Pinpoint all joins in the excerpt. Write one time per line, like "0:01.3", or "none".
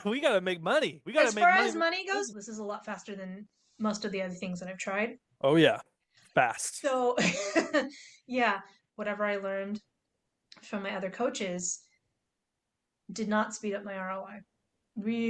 0:02.3
0:08.9